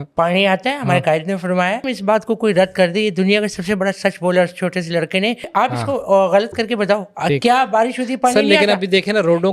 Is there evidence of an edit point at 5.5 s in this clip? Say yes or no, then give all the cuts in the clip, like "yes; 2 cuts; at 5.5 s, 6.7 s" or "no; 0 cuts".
yes; 2 cuts; at 1.9 s, 5.5 s